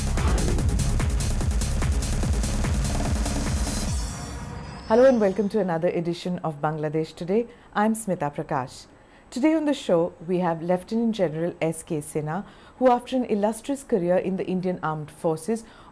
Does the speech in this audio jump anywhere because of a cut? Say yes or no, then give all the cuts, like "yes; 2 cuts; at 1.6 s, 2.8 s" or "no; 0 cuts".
yes; 1 cut; at 4.6 s